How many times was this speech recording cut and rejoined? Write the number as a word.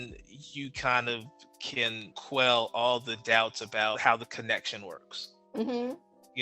two